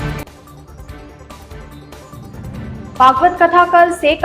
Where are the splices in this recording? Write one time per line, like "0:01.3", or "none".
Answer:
none